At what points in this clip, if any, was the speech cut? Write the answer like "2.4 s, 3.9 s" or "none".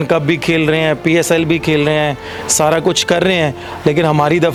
none